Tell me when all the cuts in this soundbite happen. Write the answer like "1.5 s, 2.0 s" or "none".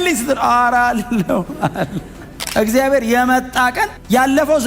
2.4 s